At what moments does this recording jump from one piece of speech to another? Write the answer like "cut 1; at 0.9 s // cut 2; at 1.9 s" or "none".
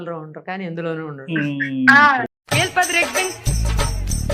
none